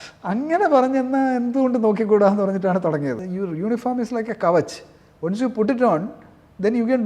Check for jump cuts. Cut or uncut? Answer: cut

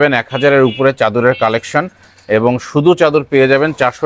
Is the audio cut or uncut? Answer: uncut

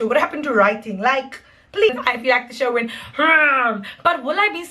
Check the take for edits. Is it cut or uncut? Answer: cut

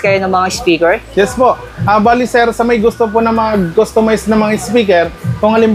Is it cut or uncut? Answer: uncut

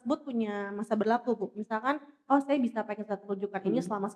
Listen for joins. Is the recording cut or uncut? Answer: uncut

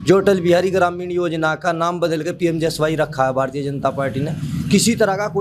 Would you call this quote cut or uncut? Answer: uncut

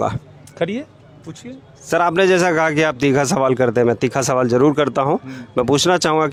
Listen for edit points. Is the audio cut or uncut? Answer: uncut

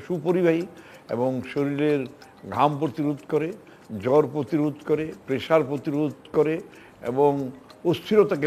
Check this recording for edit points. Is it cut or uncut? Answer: uncut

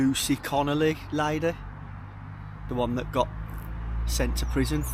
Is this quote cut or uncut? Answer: uncut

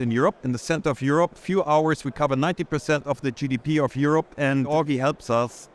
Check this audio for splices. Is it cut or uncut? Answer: uncut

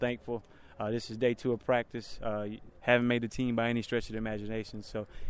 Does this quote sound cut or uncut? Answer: uncut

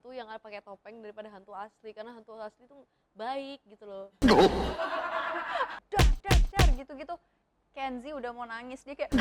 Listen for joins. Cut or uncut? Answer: cut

